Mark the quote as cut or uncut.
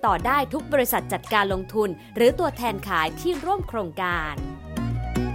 cut